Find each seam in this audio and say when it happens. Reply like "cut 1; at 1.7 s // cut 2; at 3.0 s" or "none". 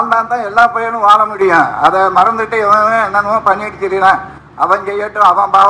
none

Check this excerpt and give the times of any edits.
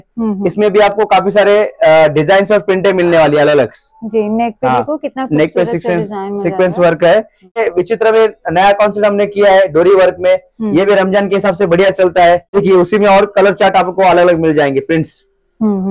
cut 1; at 7.6 s // cut 2; at 12.5 s

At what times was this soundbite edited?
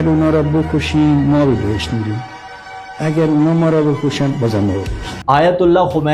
none

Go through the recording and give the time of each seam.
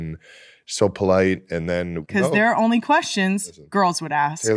cut 1; at 2.0 s

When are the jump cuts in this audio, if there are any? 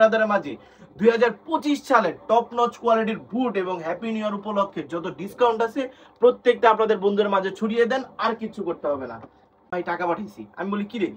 cut 1; at 9.7 s

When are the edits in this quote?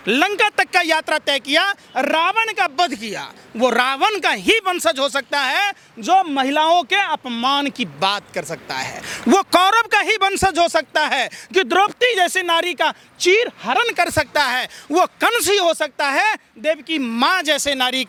none

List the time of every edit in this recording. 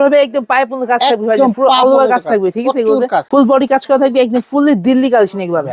cut 1; at 3.3 s

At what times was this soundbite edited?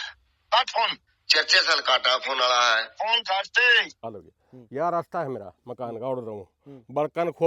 cut 1; at 4.1 s

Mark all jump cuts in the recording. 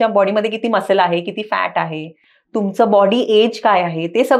none

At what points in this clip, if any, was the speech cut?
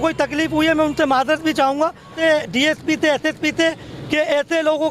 cut 1; at 2.1 s

